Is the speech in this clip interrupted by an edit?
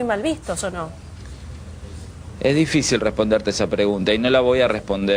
no; 0 cuts

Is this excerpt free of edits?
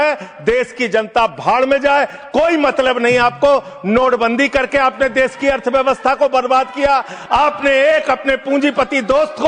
yes; 0 cuts

